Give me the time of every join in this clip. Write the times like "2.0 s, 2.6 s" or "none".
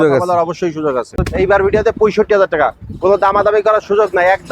1.3 s

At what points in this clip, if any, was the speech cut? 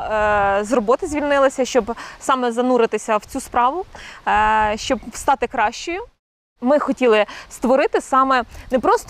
6.5 s

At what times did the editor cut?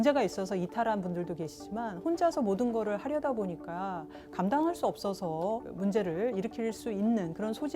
5.7 s

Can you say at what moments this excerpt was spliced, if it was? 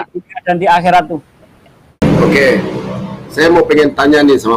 2.0 s

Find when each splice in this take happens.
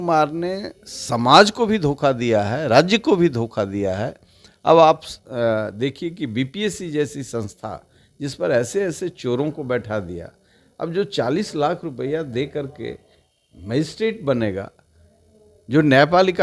none

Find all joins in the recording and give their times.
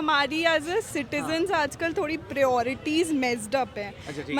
none

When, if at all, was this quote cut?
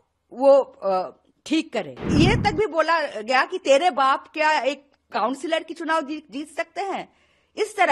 2.0 s

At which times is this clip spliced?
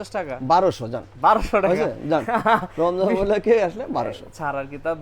none

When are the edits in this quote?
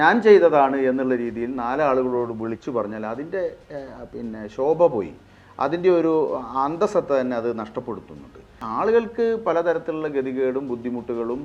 8.6 s

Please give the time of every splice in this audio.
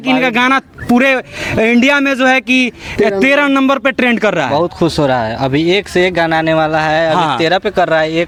none

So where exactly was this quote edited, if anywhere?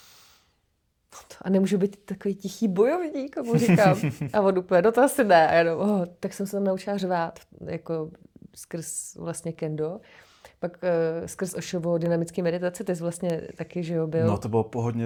none

